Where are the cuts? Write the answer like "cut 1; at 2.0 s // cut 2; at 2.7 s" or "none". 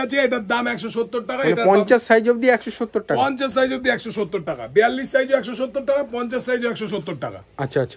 none